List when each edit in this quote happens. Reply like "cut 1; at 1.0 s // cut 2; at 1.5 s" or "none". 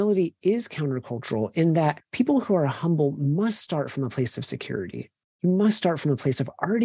cut 1; at 2.0 s